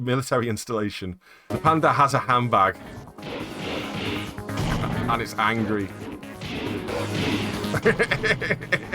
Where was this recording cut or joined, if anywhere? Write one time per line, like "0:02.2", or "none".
0:01.5